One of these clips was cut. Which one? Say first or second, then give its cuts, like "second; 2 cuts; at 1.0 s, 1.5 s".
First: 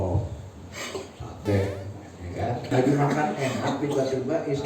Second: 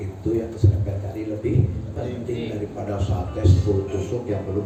first; 2 cuts; at 0.9 s, 2.7 s